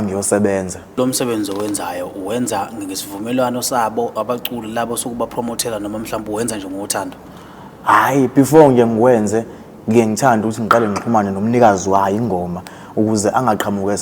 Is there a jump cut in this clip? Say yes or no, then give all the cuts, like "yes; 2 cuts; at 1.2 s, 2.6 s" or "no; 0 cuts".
yes; 1 cut; at 1.0 s